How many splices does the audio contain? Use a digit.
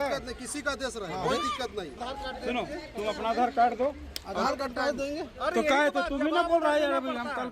1